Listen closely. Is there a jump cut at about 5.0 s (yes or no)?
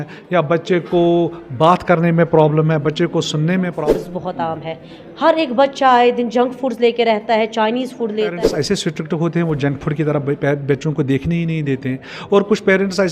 no